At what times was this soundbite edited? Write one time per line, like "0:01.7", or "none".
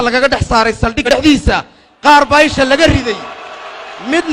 0:01.1